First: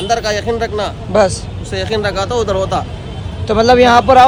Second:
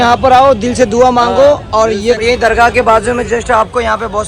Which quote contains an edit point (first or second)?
second